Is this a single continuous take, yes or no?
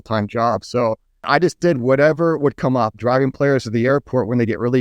no